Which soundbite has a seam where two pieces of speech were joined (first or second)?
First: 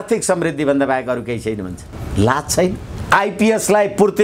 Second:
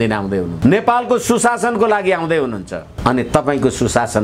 first